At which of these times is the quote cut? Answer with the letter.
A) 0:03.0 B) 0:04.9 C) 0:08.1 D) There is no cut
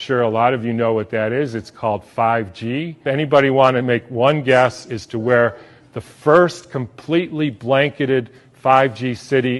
A